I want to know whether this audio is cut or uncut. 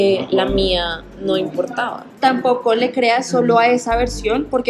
cut